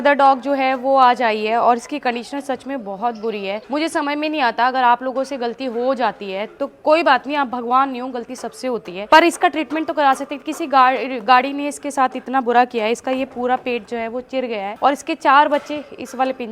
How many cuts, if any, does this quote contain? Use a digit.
0